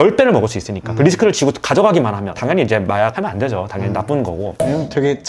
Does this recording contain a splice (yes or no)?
no